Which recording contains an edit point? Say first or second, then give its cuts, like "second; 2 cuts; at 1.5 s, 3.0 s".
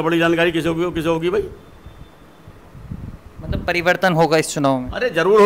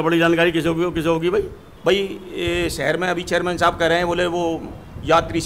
second; 1 cut; at 1.6 s